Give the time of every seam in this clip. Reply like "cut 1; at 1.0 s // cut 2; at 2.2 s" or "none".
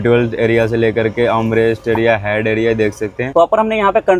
cut 1; at 3.2 s